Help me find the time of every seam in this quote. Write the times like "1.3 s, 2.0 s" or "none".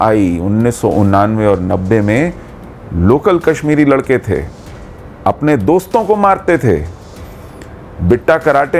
none